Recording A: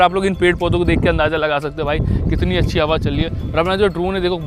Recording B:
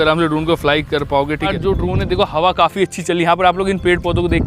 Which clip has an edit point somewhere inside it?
B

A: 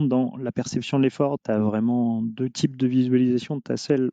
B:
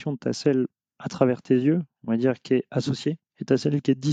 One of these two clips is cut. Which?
A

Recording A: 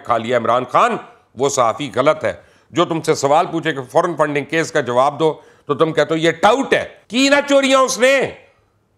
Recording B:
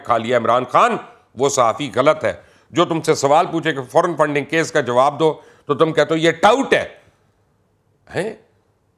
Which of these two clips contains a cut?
A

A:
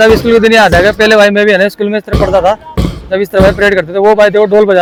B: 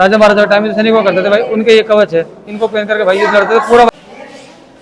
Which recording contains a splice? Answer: B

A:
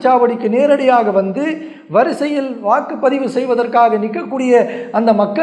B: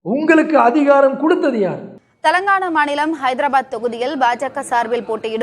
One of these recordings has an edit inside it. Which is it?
B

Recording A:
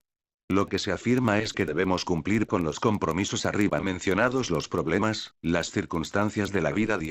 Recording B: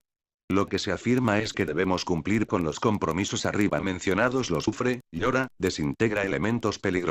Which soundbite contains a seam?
A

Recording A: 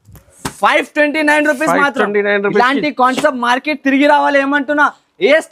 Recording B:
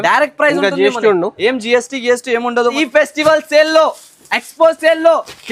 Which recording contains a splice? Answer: B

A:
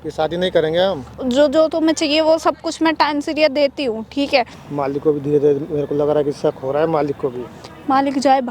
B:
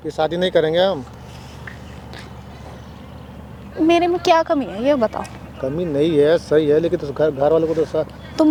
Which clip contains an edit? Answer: A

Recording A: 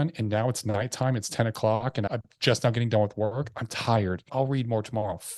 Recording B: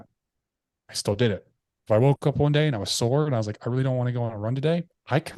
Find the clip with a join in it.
A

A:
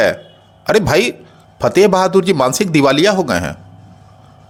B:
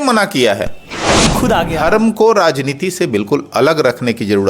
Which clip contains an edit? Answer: B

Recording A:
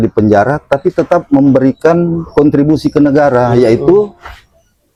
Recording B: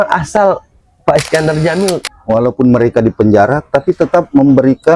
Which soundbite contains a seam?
B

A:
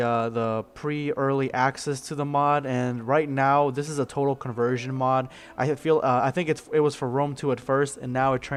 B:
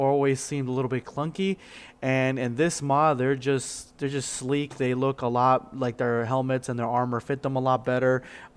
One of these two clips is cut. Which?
B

